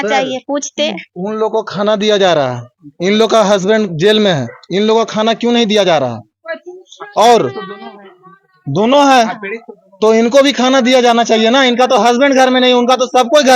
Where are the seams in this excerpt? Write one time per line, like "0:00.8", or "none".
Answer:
none